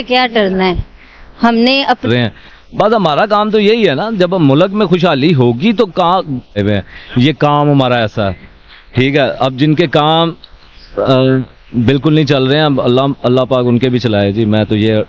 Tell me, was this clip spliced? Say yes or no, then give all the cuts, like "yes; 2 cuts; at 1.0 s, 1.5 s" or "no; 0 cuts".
yes; 2 cuts; at 2.0 s, 6.6 s